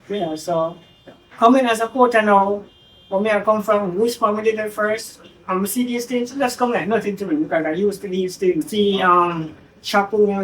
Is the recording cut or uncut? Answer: cut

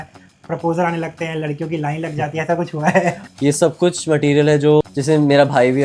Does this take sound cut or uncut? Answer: cut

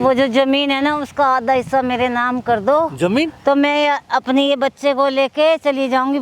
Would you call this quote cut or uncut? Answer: uncut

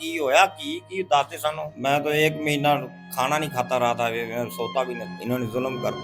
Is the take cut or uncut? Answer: cut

